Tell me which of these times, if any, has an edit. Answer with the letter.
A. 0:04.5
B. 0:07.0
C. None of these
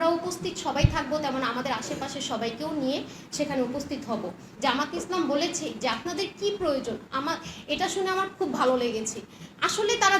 A